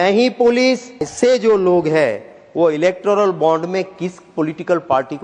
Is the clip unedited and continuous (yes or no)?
no